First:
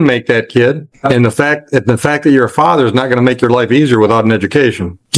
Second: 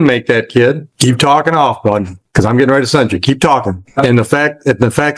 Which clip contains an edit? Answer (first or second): second